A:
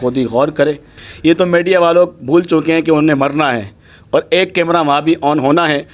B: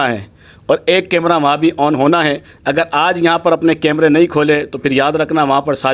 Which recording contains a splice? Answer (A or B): A